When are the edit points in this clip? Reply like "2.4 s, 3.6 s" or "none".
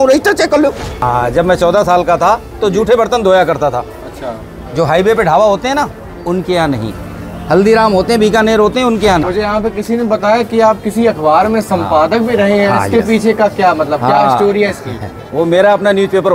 1.0 s, 9.2 s